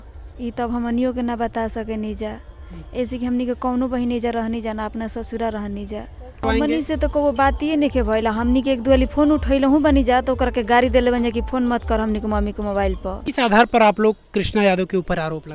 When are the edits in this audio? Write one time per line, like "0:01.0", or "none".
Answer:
0:06.4
0:13.2